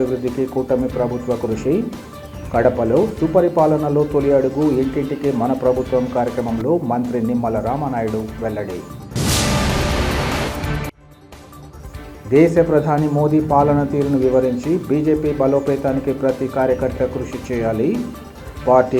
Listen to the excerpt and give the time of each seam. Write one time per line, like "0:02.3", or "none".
none